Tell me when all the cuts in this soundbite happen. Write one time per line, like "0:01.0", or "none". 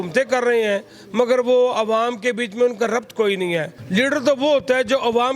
0:03.8